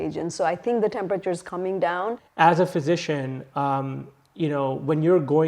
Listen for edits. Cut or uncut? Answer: cut